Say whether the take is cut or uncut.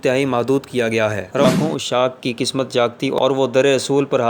cut